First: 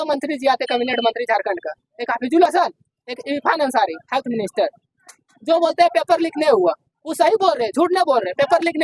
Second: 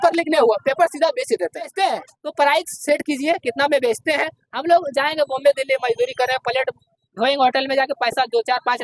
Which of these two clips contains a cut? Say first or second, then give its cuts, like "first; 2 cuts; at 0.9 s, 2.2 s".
second; 1 cut; at 1.7 s